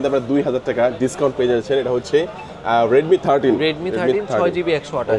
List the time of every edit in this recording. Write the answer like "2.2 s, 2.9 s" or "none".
none

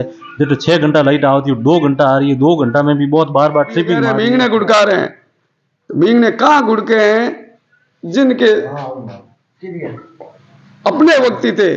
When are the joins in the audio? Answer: 4.1 s

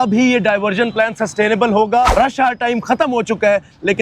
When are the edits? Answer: 2.1 s

